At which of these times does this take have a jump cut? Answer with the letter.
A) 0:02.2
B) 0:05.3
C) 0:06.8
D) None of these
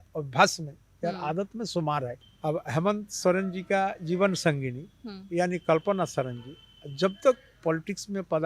A